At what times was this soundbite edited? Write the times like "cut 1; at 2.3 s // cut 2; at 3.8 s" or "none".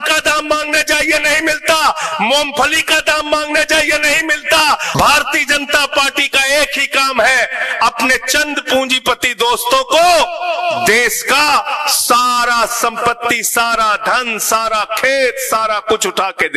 cut 1; at 4.9 s